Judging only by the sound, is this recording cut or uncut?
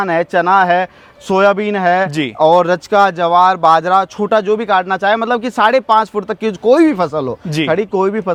uncut